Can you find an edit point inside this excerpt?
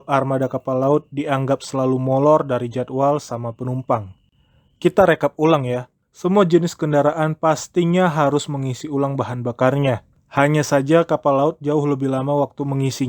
no; 0 cuts

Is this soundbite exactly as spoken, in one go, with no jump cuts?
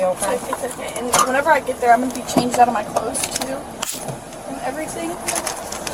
yes; 0 cuts

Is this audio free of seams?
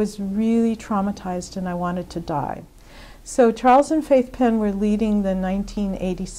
no; 1 cut; at 2.7 s

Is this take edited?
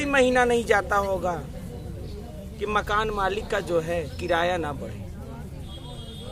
no; 0 cuts

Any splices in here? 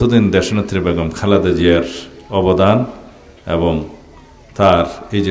no; 0 cuts

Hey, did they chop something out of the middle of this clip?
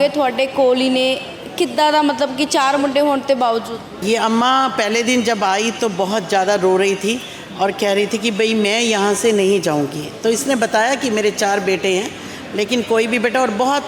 yes; 1 cut; at 4.0 s

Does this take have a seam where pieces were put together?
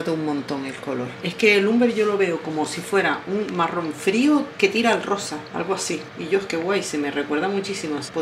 no; 0 cuts

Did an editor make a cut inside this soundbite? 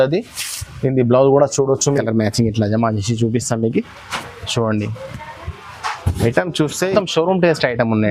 yes; 2 cuts; at 1.8 s, 6.9 s

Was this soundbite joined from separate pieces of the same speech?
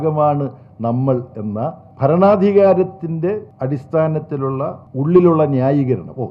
yes; 3 cuts; at 1.9 s, 3.5 s, 4.8 s

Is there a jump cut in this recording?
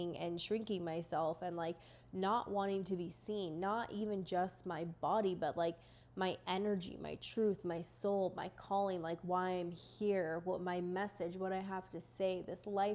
no; 0 cuts

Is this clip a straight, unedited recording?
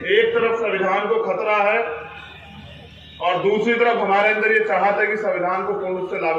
yes; 0 cuts

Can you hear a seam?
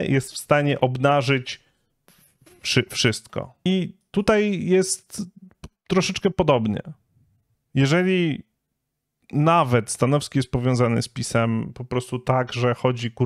yes; 1 cut; at 3.5 s

